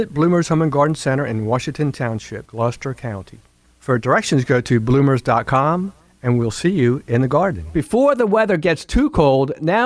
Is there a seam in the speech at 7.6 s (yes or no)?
yes